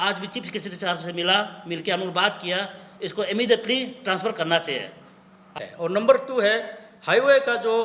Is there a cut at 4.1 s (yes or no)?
no